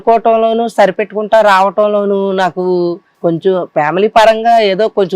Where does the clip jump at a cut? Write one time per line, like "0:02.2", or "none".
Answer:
0:03.1